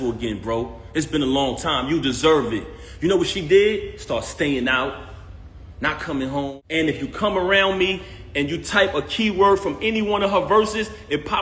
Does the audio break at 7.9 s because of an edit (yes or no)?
no